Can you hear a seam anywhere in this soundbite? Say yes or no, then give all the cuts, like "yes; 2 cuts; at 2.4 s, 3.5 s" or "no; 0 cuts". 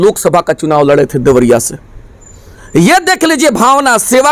no; 0 cuts